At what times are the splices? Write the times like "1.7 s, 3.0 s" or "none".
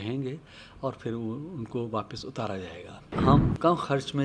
3.1 s